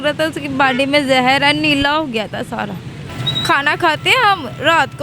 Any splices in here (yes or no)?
yes